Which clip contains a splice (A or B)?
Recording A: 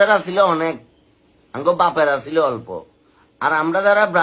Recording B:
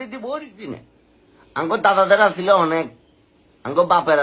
B